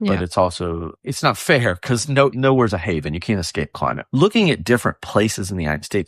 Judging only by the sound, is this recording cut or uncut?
cut